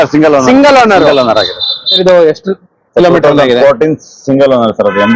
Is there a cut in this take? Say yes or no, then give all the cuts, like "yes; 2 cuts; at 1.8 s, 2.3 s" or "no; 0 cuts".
yes; 1 cut; at 2.0 s